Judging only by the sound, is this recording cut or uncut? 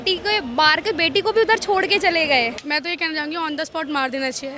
cut